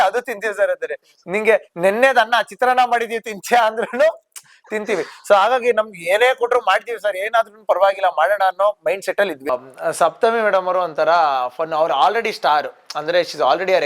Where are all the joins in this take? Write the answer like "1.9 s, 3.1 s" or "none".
9.5 s